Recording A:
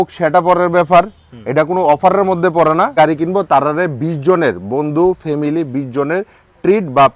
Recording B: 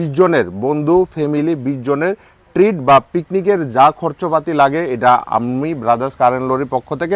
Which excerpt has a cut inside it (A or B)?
A